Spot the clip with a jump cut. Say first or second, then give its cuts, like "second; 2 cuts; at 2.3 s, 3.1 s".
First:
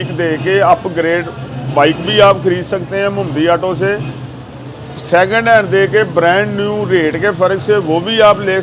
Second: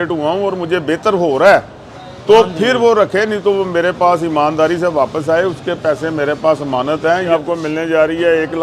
second; 1 cut; at 7.3 s